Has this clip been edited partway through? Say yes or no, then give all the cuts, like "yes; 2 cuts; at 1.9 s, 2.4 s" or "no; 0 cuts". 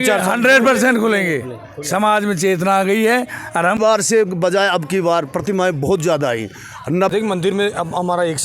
yes; 2 cuts; at 3.6 s, 7.1 s